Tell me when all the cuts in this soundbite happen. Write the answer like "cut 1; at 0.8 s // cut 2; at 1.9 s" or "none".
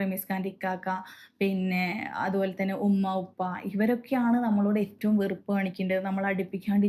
none